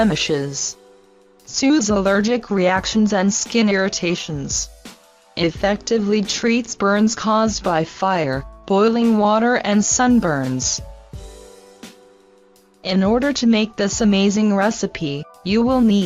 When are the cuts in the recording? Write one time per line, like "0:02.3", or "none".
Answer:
0:13.4